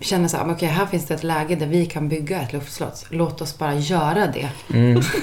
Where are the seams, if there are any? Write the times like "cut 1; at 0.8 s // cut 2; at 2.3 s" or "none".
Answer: none